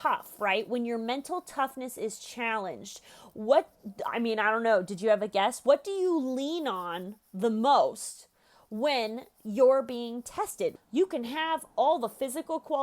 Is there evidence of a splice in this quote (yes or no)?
yes